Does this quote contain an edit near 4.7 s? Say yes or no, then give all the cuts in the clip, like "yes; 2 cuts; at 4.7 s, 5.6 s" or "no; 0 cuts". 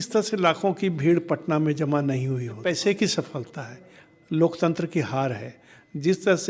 no; 1 cut; at 2.6 s